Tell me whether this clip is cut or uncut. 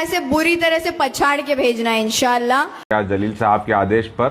cut